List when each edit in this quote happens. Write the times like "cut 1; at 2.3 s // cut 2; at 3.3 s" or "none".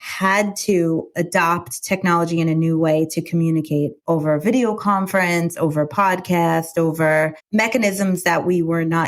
cut 1; at 1.1 s